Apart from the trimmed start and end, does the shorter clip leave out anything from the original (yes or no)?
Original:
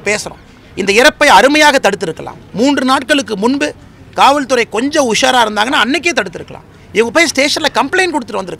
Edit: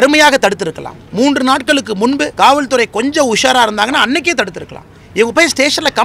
yes